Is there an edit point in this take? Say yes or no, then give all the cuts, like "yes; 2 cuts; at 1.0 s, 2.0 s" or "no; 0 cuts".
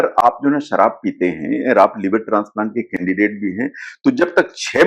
no; 0 cuts